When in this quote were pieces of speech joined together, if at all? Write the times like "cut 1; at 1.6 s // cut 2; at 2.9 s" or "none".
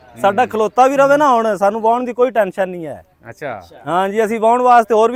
none